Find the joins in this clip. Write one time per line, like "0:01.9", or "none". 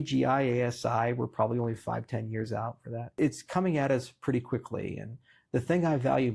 0:03.1